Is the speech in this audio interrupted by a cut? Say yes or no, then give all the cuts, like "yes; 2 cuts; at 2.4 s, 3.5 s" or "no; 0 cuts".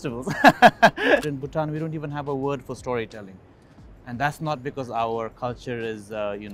yes; 1 cut; at 1.3 s